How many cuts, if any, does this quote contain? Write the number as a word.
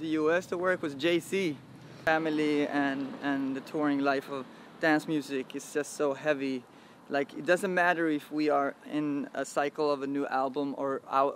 one